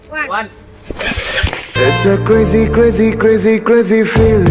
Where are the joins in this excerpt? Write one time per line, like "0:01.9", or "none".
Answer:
none